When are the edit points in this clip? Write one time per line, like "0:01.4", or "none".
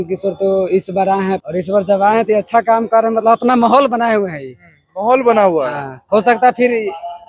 0:01.4